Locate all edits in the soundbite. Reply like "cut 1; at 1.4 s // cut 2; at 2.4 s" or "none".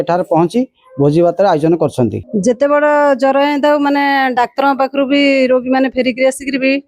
cut 1; at 2.2 s